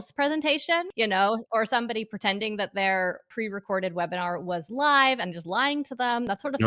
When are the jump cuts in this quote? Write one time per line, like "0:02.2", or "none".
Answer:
0:00.9
0:03.3